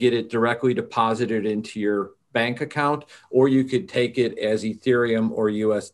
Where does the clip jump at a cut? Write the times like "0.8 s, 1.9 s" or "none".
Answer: none